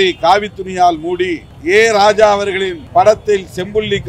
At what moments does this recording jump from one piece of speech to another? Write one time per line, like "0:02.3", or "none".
0:01.5
0:02.8